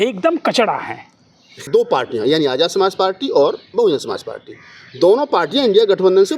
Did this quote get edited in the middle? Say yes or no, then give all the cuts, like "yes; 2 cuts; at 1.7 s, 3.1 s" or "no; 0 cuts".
yes; 1 cut; at 1.6 s